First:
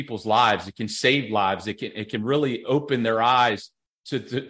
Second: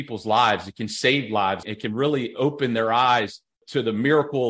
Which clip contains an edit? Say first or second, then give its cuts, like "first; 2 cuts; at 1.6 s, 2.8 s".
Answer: second; 2 cuts; at 1.7 s, 3.6 s